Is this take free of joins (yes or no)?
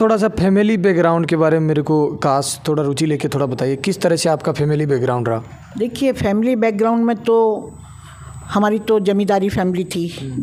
yes